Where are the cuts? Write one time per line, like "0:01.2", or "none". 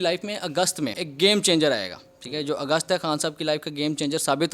0:01.0